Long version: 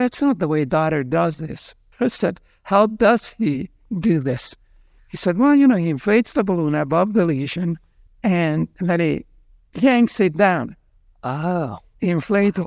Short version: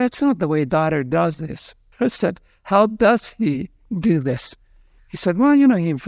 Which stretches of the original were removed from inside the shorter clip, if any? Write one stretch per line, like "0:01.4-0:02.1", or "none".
none